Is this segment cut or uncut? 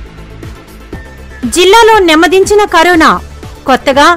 cut